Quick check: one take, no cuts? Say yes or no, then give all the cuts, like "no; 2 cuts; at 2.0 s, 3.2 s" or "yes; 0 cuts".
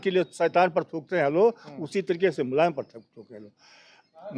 yes; 0 cuts